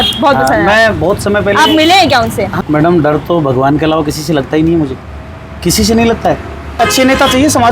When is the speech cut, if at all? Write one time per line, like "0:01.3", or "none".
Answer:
0:02.5
0:06.8